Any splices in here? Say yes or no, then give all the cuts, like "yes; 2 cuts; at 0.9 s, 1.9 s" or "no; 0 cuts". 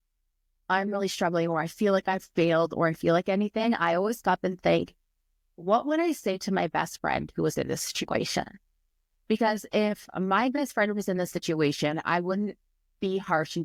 no; 0 cuts